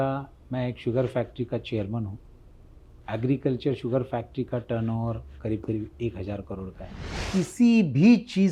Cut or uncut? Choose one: cut